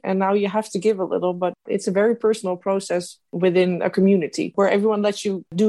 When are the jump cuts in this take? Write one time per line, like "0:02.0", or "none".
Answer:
0:01.6